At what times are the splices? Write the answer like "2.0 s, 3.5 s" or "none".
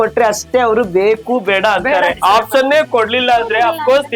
none